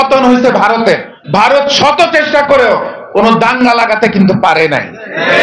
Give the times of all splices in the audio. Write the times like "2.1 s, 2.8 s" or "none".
1.2 s